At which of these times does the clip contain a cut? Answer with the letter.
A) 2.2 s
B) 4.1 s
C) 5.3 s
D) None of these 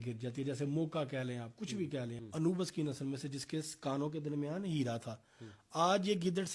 A